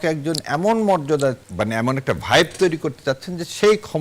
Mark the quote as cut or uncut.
cut